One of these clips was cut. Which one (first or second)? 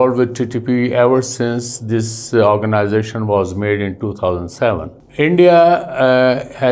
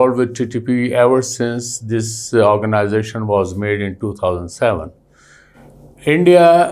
first